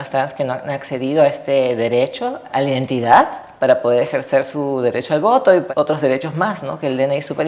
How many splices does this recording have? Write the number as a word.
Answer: two